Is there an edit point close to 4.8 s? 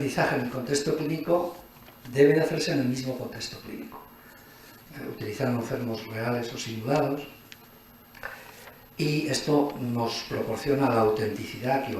yes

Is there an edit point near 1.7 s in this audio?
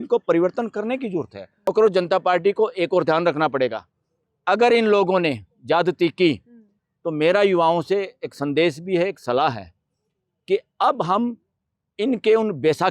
yes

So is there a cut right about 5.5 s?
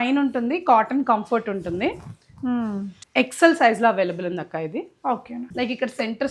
yes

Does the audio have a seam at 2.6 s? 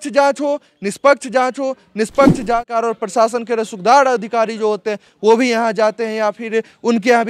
yes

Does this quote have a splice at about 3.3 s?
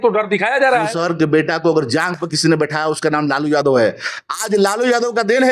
no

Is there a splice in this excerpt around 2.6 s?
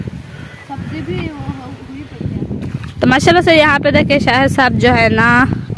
yes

